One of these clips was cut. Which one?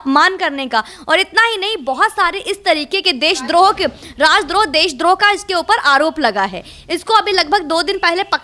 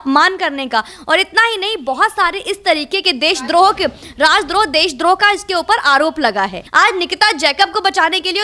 second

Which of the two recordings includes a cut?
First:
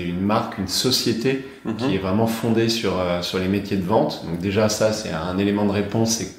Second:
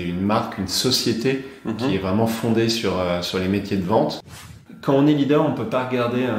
second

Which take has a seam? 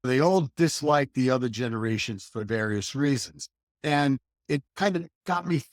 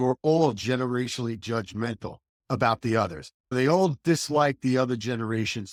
first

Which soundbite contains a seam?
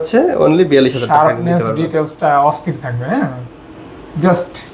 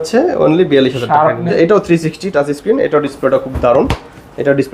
second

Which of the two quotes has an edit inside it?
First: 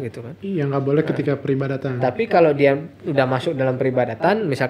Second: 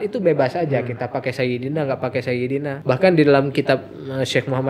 second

